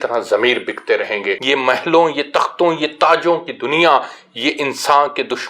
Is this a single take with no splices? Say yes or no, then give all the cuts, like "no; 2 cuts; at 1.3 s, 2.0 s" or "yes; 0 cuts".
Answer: no; 1 cut; at 1.4 s